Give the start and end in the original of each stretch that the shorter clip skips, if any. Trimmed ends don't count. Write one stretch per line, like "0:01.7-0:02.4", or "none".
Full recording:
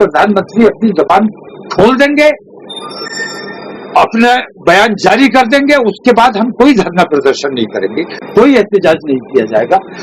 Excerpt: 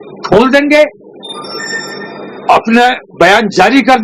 none